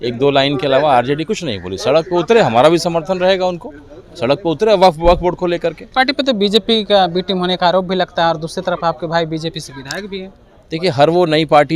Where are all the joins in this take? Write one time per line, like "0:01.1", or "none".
0:05.8